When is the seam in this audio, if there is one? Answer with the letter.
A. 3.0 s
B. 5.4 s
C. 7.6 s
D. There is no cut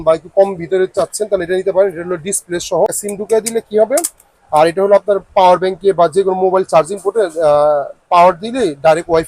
A